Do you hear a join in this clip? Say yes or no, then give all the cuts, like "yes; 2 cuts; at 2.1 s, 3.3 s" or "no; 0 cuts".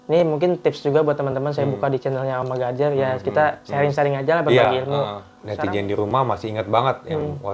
yes; 1 cut; at 5.4 s